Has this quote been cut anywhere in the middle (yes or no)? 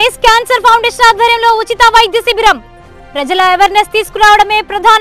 no